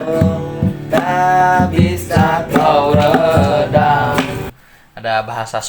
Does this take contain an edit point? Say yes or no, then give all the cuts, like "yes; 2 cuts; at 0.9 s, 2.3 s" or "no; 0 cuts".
yes; 1 cut; at 4.5 s